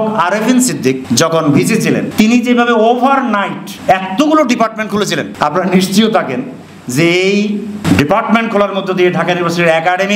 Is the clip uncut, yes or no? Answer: no